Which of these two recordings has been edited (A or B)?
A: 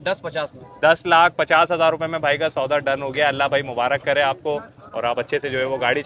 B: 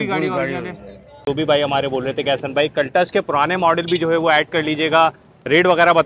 B